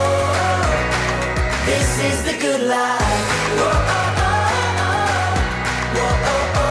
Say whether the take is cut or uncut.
uncut